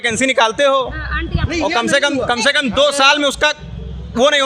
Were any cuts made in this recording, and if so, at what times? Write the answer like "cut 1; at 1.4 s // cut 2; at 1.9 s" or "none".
none